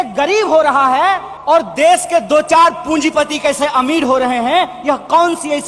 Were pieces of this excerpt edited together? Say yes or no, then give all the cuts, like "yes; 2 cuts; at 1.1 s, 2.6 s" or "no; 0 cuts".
yes; 1 cut; at 1.3 s